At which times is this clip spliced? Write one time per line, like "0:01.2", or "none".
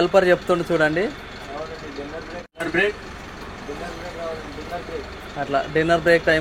0:02.5